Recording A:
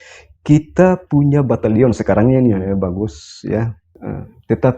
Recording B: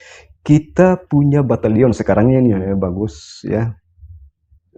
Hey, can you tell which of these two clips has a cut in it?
A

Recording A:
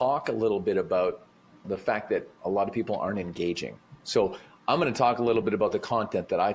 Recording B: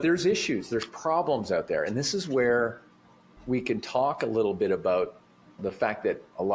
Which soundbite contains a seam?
A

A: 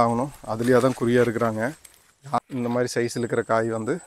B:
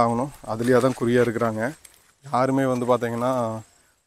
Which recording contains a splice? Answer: A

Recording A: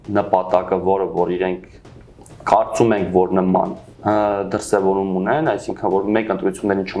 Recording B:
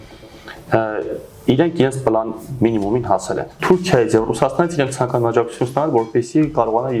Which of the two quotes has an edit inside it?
B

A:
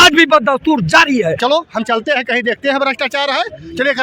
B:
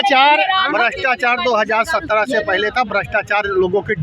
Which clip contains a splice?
A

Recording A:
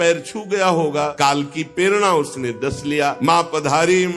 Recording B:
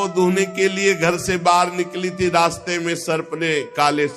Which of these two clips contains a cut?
A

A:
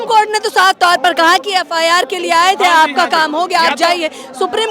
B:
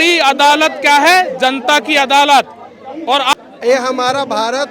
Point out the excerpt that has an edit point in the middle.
B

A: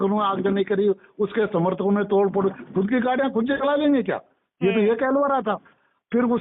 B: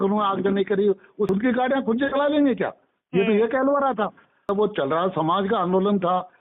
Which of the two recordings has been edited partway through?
B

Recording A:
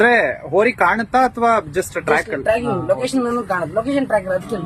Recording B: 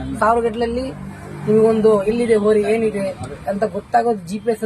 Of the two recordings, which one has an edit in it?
B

